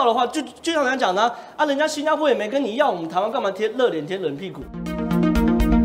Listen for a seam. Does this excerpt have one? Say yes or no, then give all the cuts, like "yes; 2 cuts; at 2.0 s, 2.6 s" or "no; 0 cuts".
yes; 1 cut; at 4.8 s